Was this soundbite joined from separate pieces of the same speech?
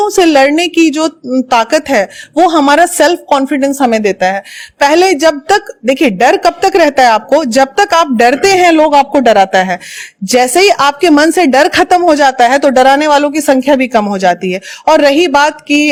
no; 0 cuts

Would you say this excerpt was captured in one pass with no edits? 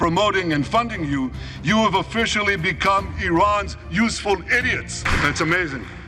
no; 1 cut; at 5.0 s

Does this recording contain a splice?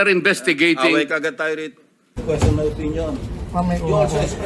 yes; 1 cut; at 2.2 s

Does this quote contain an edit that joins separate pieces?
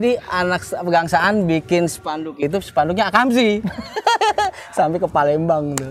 no; 0 cuts

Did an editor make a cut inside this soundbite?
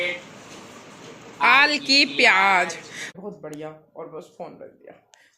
yes; 1 cut; at 3.0 s

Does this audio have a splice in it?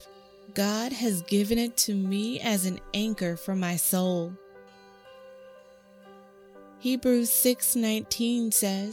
no; 0 cuts

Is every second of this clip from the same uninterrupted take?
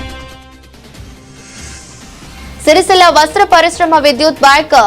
yes; 0 cuts

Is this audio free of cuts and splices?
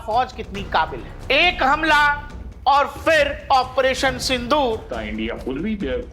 no; 2 cuts; at 1.1 s, 4.9 s

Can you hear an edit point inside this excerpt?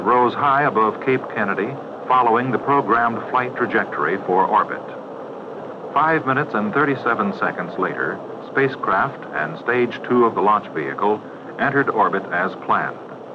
yes; 1 cut; at 11.5 s

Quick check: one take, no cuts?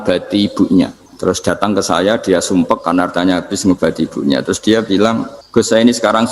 no; 2 cuts; at 1.0 s, 5.3 s

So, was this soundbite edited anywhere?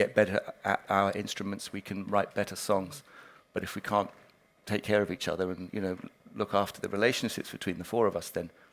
no; 0 cuts

